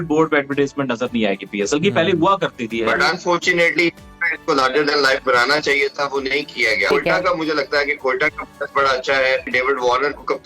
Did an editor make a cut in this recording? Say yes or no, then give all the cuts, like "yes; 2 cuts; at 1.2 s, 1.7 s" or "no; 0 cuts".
yes; 3 cuts; at 3.0 s, 6.9 s, 9.5 s